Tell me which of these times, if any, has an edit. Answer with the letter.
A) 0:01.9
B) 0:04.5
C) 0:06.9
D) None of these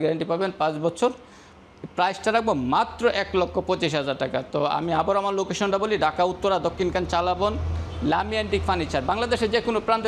D